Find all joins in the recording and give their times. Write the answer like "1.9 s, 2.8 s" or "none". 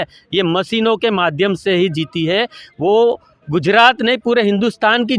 none